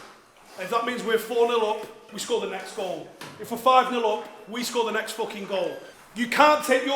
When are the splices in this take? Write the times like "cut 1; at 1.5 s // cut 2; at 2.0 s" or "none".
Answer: cut 1; at 5.9 s